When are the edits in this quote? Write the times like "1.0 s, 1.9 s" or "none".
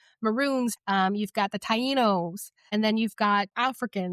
0.8 s, 2.6 s

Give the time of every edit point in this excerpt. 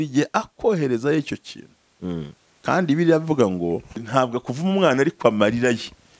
3.9 s

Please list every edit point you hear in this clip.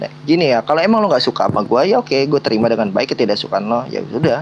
none

